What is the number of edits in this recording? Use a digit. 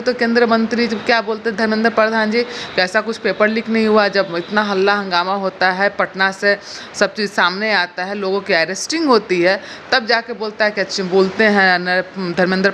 0